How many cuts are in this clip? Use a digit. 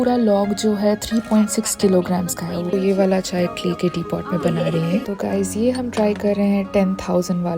2